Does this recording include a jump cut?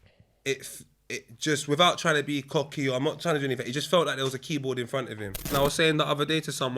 yes; 1 cut; at 5.5 s

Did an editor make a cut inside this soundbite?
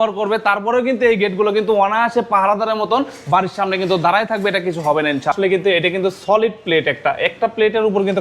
yes; 1 cut; at 5.3 s

